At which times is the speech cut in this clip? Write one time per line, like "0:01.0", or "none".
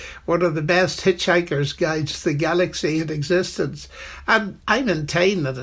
0:04.5